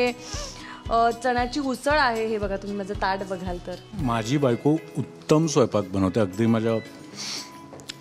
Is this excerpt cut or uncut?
cut